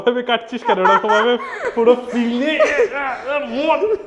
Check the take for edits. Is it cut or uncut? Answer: uncut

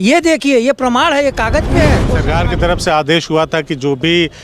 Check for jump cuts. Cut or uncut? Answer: cut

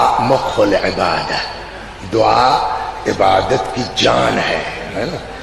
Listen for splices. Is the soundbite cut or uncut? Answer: uncut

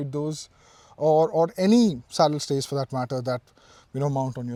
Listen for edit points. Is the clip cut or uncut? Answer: uncut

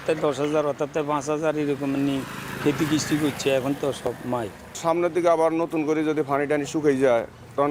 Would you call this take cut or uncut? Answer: uncut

